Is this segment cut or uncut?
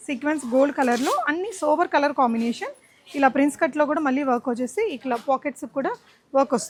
uncut